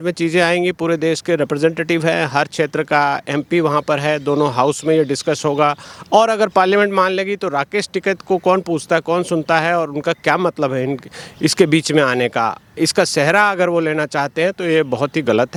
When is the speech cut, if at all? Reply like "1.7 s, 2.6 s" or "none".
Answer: none